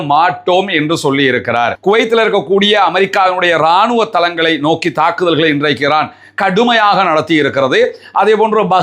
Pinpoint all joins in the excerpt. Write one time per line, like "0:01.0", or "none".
0:01.8